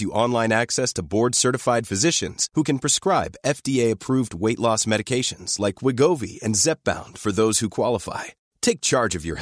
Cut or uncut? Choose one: uncut